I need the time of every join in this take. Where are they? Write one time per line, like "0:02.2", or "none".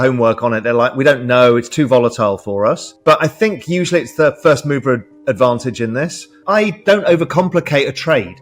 0:02.9
0:06.3